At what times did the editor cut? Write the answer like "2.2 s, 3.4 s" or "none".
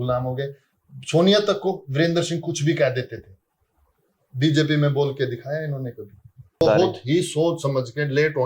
6.6 s